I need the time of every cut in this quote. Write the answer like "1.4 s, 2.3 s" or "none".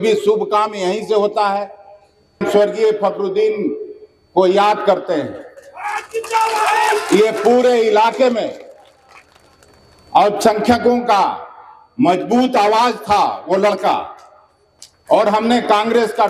2.4 s